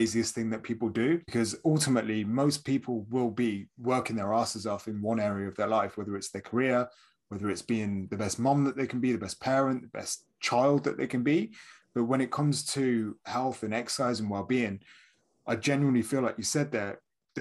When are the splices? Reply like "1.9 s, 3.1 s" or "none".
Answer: 1.3 s